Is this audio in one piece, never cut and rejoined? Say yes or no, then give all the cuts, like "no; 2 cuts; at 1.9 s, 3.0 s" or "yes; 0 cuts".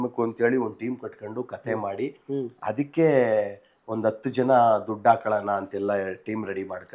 yes; 0 cuts